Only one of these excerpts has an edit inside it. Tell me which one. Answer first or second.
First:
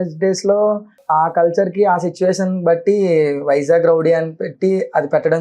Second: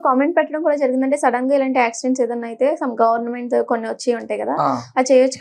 first